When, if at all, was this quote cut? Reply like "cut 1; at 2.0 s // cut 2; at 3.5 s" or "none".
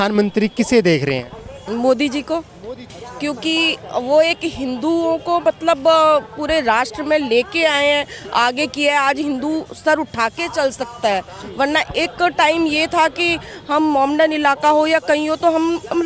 cut 1; at 3.0 s